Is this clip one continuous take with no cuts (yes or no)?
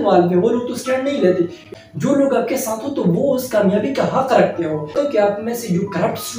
no